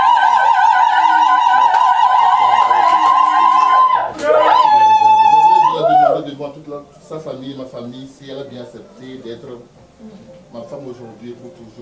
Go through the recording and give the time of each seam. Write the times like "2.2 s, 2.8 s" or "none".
none